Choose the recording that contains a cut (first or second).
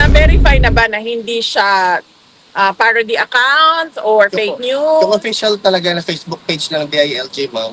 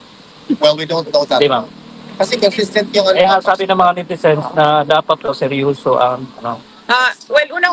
second